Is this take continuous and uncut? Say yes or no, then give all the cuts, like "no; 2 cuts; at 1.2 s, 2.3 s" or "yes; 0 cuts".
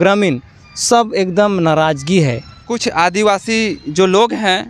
no; 1 cut; at 2.7 s